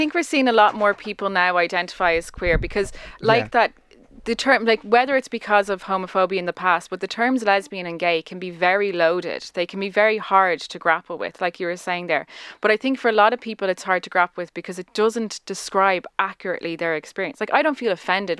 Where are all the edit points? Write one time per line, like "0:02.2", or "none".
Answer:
none